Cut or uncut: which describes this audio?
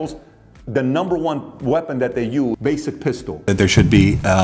cut